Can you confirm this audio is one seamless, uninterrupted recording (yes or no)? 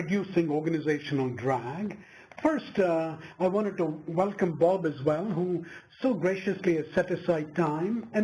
yes